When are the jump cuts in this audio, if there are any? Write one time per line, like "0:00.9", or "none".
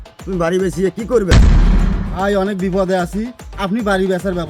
none